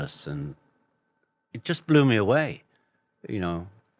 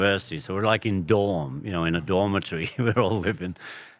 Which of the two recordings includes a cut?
second; 1 cut; at 1.3 s

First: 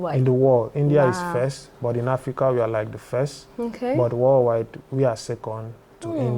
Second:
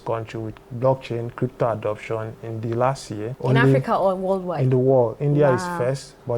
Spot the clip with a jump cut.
second; 1 cut; at 3.3 s

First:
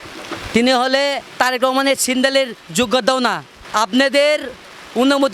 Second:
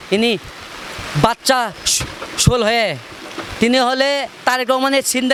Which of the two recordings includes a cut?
first; 1 cut; at 3.6 s

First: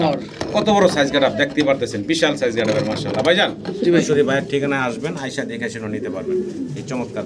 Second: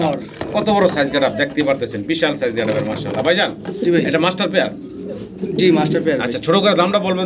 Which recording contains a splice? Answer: first; 1 cut; at 4.1 s

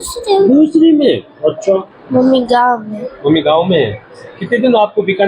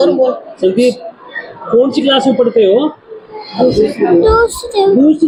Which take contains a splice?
first; 1 cut; at 1.9 s

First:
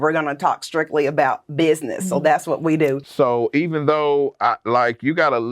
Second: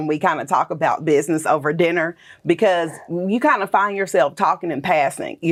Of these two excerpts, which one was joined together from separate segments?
first; 1 cut; at 3.0 s

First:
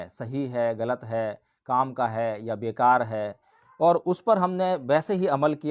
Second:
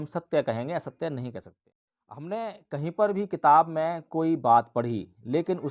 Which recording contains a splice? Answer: second; 1 cut; at 1.5 s

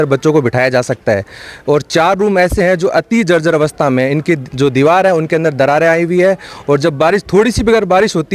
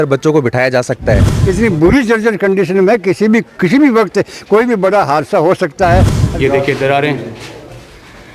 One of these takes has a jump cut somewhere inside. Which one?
second; 2 cuts; at 1.4 s, 6.2 s

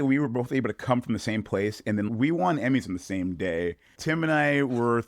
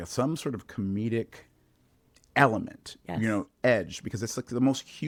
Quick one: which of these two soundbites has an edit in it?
first; 2 cuts; at 2.1 s, 3.9 s

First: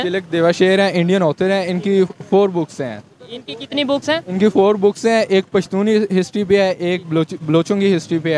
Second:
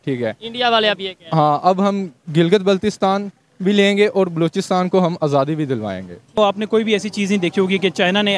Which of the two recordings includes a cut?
second; 1 cut; at 6.4 s

